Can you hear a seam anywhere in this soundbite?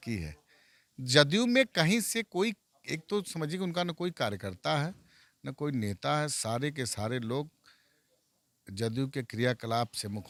no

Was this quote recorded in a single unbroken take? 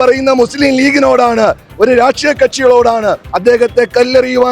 no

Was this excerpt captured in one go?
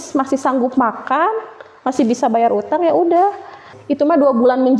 no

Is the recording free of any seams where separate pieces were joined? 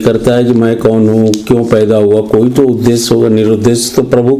yes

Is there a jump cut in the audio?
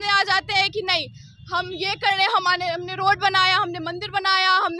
no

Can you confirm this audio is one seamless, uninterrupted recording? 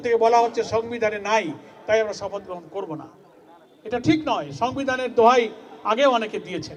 yes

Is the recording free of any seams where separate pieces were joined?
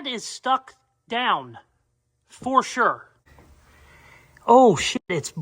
no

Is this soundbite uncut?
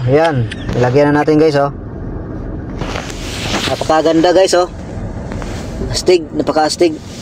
yes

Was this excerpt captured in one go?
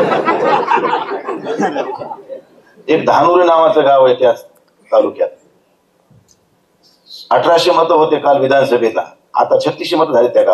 yes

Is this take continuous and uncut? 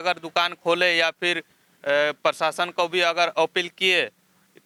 yes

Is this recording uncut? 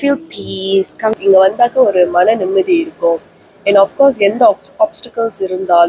no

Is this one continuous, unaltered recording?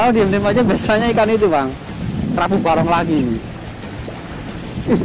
yes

